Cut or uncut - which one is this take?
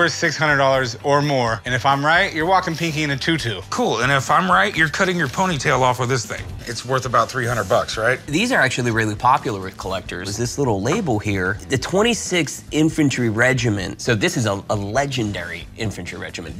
cut